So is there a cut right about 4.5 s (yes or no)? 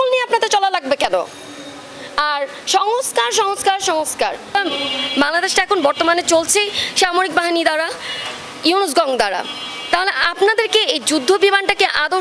yes